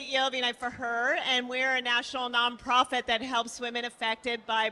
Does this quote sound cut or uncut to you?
uncut